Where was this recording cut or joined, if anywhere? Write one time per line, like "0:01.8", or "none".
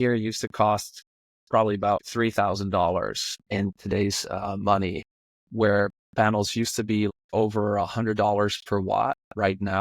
0:02.0
0:03.3
0:05.4
0:07.1